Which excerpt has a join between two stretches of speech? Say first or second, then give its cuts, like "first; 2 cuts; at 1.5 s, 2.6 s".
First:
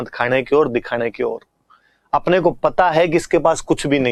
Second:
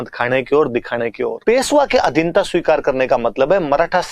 second; 1 cut; at 1.4 s